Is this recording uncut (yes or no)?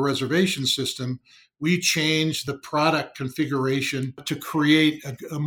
no